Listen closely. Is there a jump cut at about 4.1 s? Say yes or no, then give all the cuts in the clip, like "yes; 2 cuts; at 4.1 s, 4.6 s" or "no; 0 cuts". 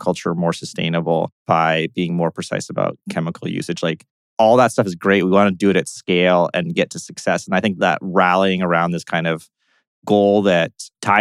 no; 1 cut; at 1.4 s